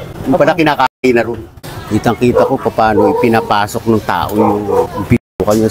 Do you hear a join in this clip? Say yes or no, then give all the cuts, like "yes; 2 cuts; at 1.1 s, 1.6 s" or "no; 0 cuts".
no; 0 cuts